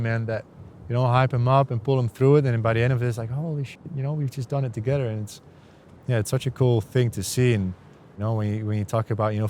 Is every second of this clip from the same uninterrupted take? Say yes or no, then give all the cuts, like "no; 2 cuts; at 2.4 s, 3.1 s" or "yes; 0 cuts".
no; 1 cut; at 8.2 s